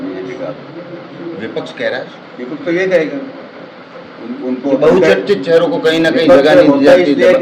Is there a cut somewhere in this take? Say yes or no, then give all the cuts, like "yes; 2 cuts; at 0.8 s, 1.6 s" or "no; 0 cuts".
no; 0 cuts